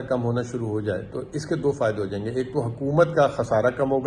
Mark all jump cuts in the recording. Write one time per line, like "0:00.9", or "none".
none